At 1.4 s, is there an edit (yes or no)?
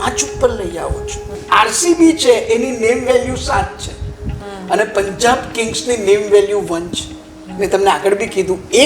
yes